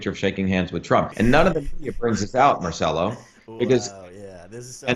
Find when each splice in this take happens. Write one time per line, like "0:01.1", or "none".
0:01.1